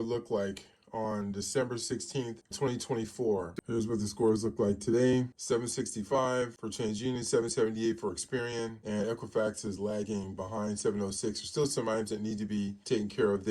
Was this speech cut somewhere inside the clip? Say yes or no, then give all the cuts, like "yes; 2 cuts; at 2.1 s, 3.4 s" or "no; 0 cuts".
yes; 2 cuts; at 2.4 s, 3.6 s